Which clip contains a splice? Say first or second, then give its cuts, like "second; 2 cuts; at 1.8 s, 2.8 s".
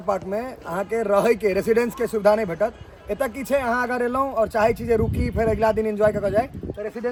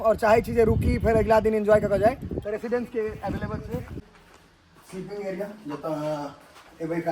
second; 1 cut; at 4.0 s